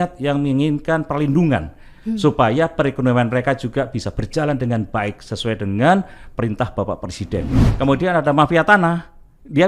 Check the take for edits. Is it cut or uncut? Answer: cut